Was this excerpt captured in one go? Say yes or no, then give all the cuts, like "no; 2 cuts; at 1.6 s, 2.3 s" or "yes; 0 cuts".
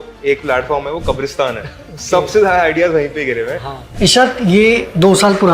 no; 1 cut; at 3.8 s